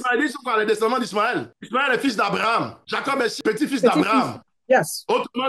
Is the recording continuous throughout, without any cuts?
no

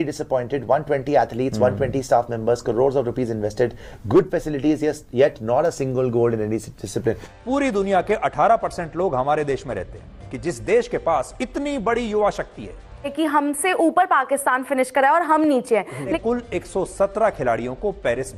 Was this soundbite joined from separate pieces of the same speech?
yes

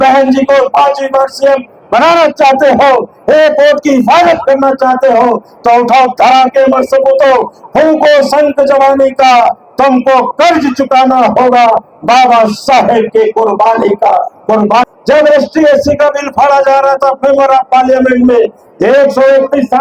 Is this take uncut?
no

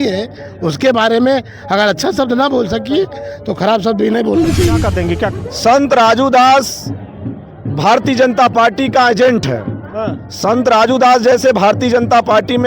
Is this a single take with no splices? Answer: no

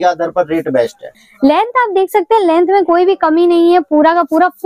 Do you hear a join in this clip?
yes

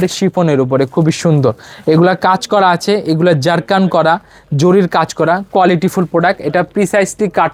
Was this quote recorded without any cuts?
yes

